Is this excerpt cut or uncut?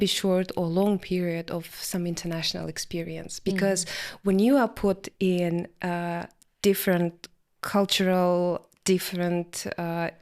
uncut